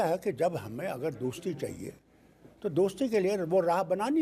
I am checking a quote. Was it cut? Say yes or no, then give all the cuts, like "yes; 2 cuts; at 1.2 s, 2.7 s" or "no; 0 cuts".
no; 0 cuts